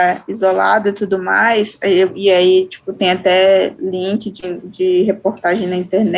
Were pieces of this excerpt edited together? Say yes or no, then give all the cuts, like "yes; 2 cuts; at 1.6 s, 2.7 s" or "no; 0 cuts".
no; 0 cuts